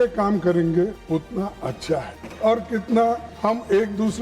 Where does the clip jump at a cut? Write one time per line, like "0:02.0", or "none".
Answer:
0:01.0
0:02.2
0:03.3